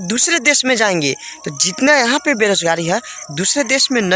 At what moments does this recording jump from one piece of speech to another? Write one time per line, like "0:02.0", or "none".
none